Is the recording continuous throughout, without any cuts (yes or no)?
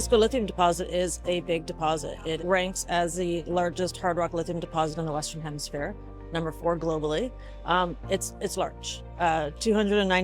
yes